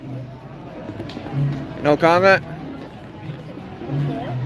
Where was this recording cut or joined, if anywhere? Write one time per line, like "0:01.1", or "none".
none